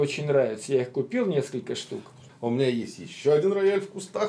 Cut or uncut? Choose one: cut